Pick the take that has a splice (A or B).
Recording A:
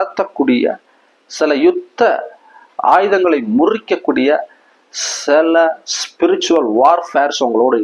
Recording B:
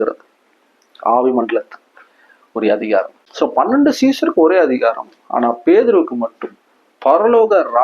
B